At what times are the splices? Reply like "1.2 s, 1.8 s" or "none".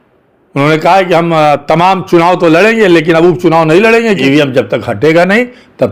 4.2 s